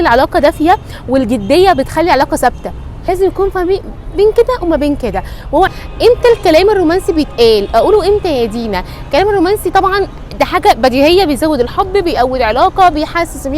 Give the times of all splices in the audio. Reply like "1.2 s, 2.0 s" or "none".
2.9 s, 5.7 s